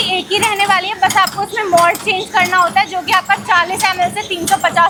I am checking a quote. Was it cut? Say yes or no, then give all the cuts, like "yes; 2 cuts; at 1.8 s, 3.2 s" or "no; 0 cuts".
no; 0 cuts